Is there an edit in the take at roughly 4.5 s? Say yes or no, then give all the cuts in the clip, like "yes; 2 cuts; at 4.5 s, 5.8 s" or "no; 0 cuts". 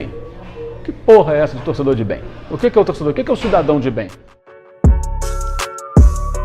yes; 1 cut; at 4.5 s